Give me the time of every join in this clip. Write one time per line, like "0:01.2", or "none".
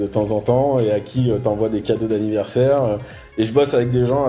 0:03.2

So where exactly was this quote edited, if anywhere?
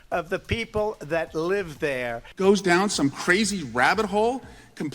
0:02.2

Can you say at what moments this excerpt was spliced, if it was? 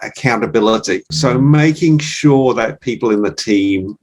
0:01.1

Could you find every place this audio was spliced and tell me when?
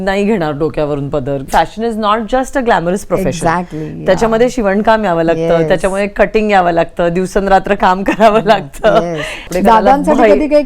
0:01.4
0:09.4

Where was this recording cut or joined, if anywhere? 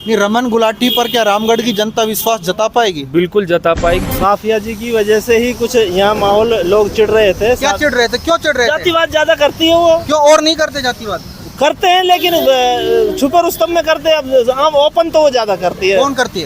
0:04.1

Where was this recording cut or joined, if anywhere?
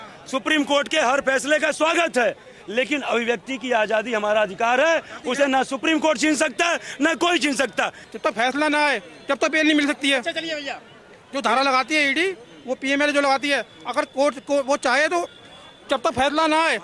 0:08.0

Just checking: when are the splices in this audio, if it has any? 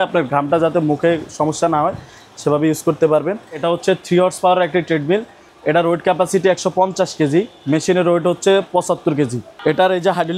0:03.6
0:09.4

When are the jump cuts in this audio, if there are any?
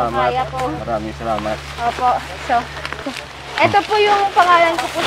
0:03.0

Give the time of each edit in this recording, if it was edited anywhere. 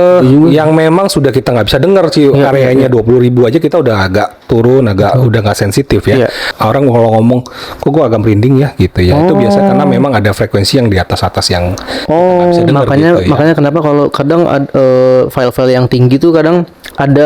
0:06.5

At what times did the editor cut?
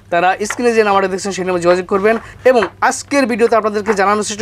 0:02.3

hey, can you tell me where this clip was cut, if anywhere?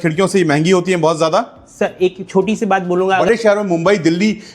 0:03.2

